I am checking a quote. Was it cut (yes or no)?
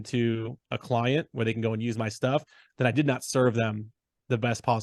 no